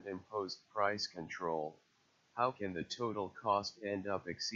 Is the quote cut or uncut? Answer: uncut